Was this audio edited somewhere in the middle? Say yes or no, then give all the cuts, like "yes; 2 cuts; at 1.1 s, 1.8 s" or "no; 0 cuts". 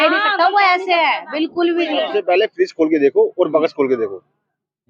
yes; 1 cut; at 2.1 s